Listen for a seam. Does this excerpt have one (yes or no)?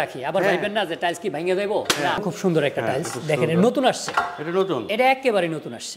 yes